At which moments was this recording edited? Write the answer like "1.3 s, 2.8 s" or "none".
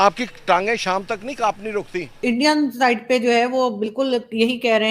2.2 s